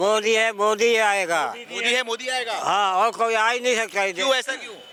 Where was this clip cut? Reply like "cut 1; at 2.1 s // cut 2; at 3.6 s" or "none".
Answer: none